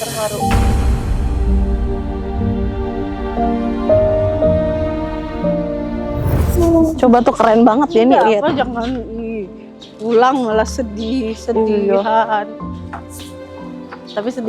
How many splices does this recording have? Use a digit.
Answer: 1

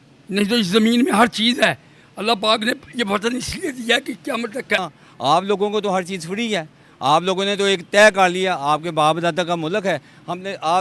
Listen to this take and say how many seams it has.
1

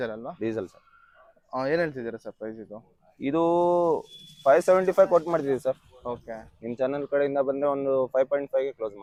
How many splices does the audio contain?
0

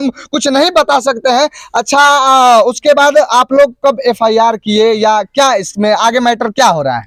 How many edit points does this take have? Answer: 0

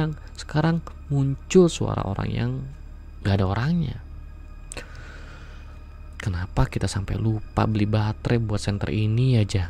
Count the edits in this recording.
0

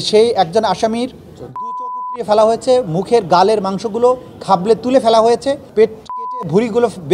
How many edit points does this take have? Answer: 1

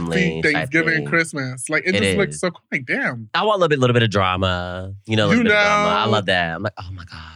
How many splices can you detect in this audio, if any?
1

